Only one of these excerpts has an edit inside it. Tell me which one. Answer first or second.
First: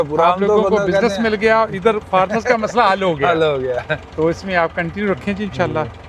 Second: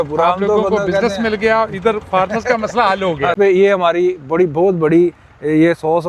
second